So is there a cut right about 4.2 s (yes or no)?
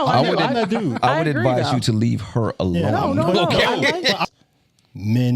yes